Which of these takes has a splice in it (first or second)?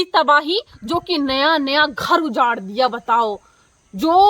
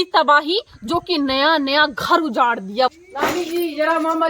second